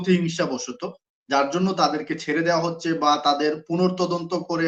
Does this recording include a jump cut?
no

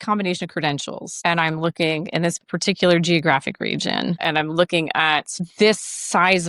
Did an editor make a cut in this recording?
no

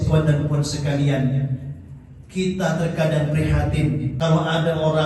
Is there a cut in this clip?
yes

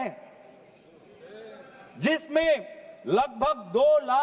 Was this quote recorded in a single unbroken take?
yes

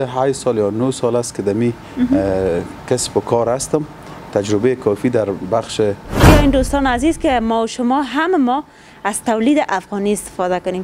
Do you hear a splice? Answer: yes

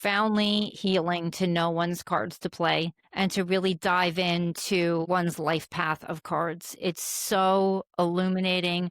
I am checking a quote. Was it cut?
yes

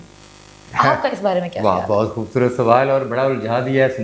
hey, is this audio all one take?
yes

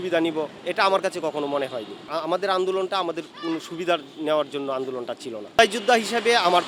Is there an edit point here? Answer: no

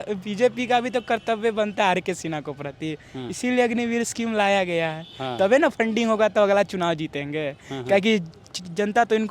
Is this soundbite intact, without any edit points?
yes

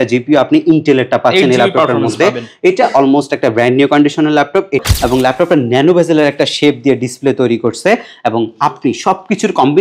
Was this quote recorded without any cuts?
no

